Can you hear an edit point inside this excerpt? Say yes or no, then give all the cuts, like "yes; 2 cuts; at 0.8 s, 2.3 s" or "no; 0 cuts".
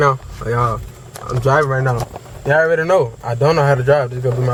no; 0 cuts